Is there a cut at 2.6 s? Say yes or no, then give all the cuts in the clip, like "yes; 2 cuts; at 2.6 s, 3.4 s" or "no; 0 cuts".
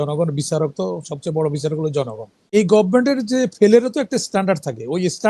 yes; 1 cut; at 2.6 s